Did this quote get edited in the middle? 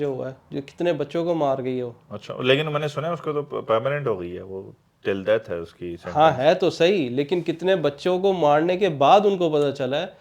no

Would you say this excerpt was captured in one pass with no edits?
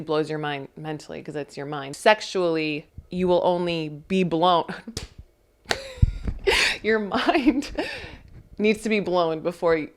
yes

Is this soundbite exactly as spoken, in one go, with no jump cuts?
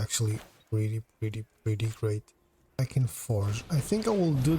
no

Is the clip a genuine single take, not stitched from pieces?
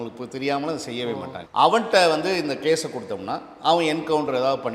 no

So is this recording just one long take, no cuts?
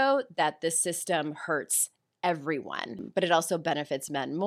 no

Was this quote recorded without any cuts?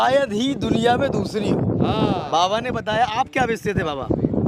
yes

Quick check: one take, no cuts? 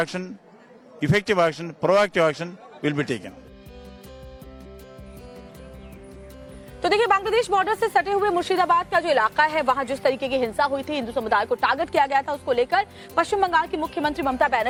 yes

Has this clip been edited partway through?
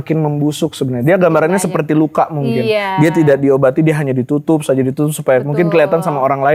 no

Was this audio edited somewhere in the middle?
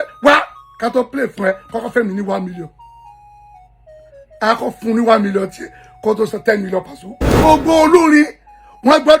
yes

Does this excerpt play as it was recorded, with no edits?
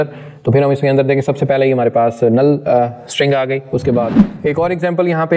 no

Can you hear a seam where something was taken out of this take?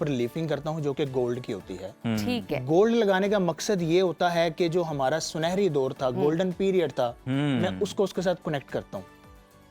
no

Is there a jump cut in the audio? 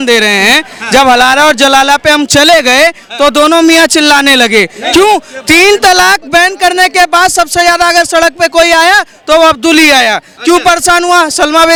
no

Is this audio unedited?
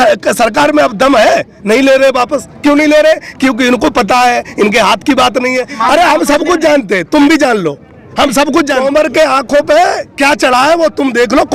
no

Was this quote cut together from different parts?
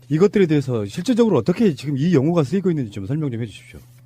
no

